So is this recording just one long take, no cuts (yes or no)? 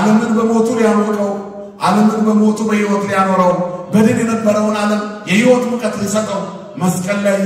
yes